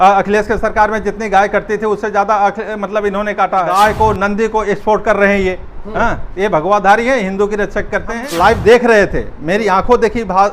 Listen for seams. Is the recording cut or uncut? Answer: cut